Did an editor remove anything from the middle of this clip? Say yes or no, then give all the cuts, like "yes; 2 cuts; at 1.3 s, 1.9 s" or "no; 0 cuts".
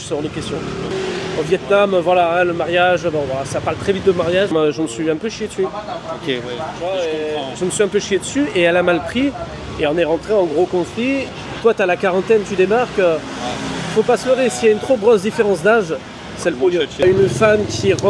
yes; 4 cuts; at 0.9 s, 4.5 s, 11.3 s, 17.0 s